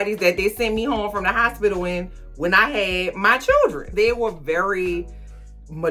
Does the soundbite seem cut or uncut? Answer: cut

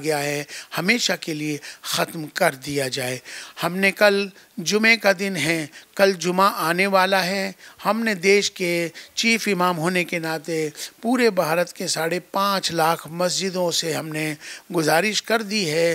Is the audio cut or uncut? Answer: uncut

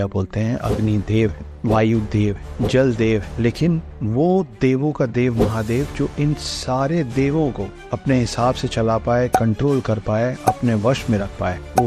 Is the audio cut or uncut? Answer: uncut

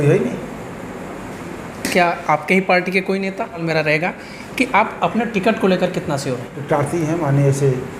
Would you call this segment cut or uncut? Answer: cut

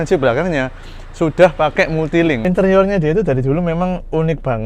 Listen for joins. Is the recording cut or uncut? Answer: cut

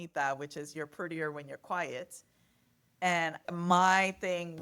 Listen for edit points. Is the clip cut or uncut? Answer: uncut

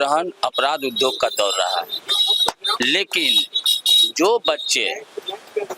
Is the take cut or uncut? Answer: uncut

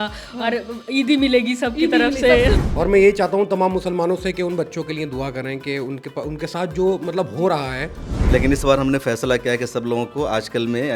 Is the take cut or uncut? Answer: cut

